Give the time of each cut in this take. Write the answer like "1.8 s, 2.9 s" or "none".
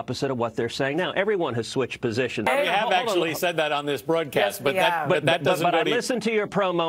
2.5 s